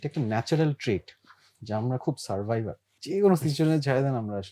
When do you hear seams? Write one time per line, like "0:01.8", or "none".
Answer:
0:02.9